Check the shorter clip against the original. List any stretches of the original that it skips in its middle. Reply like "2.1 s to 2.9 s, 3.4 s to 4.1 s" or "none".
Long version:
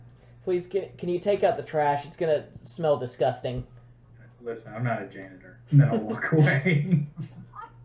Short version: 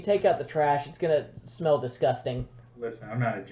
3.8 s to 4.2 s